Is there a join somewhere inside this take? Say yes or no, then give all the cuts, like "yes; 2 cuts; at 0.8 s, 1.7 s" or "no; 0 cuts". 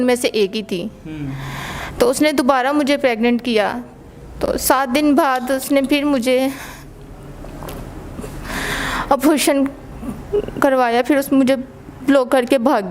no; 0 cuts